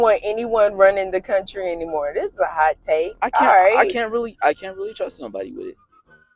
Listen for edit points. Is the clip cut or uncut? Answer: uncut